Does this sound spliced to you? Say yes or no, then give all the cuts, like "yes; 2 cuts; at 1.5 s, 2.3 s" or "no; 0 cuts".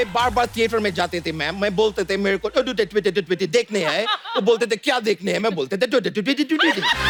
no; 0 cuts